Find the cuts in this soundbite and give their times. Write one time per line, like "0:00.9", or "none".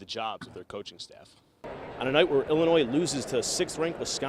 0:01.8